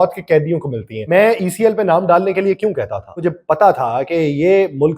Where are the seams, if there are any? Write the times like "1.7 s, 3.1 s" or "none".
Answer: 1.0 s, 3.2 s